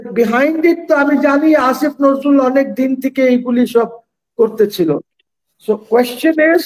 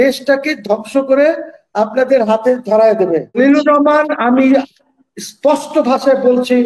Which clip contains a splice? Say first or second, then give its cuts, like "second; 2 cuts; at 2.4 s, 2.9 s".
second; 1 cut; at 3.4 s